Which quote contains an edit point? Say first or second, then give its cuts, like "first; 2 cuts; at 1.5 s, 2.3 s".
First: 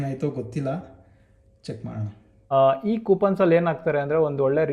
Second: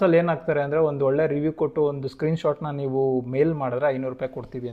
first; 1 cut; at 2.4 s